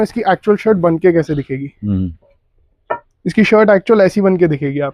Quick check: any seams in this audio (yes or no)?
no